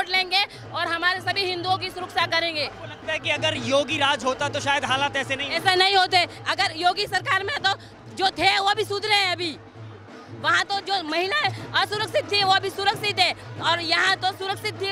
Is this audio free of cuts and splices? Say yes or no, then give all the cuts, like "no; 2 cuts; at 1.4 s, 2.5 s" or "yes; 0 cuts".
yes; 0 cuts